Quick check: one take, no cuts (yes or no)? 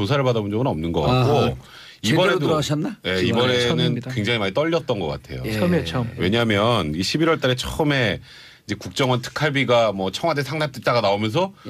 no